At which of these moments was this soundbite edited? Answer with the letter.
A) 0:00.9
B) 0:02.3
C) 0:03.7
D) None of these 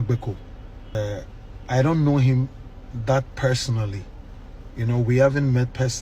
A